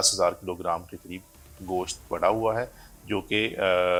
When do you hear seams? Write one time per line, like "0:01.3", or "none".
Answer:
none